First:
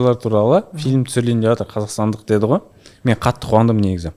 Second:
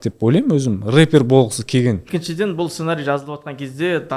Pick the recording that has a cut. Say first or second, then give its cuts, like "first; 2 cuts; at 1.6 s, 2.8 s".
second; 1 cut; at 2.1 s